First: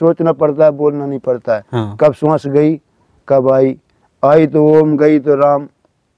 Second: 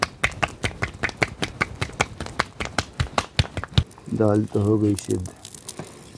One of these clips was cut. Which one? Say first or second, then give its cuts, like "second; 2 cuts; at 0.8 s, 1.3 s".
second; 1 cut; at 4.0 s